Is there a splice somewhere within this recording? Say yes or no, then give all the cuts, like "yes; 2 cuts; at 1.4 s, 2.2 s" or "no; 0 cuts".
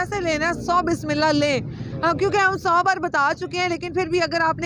no; 0 cuts